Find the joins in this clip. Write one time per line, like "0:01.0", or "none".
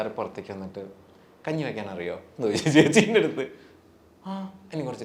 none

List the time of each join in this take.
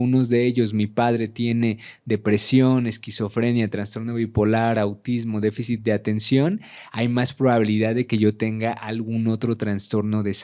none

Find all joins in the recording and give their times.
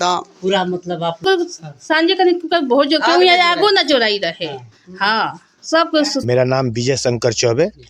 0:01.2
0:06.4

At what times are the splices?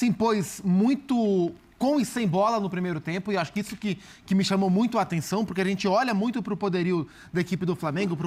none

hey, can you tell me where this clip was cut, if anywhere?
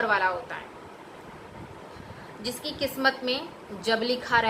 0:01.2

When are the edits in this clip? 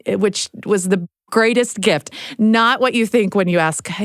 0:02.1

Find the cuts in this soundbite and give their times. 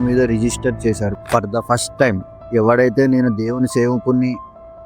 0:01.2

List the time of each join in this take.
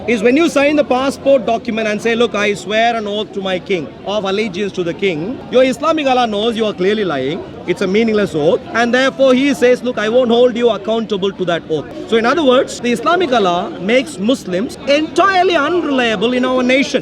0:05.4
0:07.5
0:08.7
0:11.9
0:12.8
0:14.7

